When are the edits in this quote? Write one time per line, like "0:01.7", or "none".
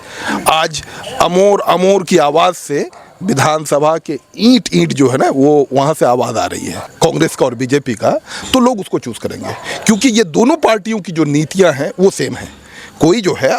0:06.8